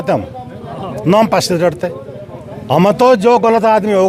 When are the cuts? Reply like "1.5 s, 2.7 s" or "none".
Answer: none